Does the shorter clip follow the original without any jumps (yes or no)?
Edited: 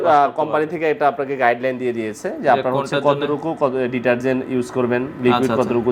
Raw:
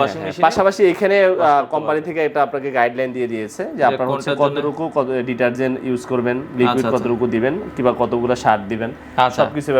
yes